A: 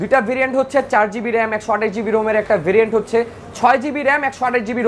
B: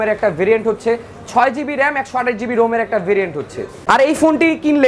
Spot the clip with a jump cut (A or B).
B